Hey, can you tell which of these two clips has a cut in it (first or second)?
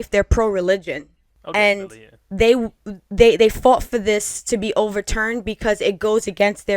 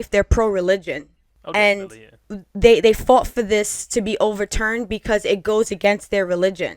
second